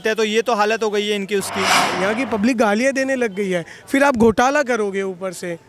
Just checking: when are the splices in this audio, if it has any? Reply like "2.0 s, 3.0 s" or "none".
1.9 s